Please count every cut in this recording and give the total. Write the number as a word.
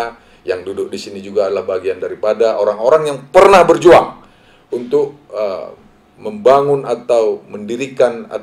zero